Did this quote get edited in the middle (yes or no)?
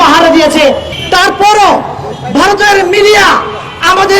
yes